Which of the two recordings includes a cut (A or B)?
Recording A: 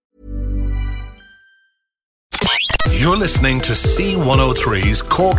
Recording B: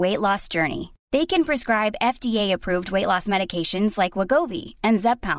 A